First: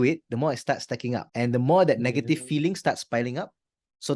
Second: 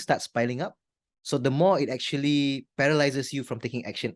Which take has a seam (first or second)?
first